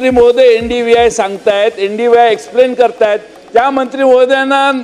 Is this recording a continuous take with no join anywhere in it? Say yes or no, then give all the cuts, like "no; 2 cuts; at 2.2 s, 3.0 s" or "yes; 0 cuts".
yes; 0 cuts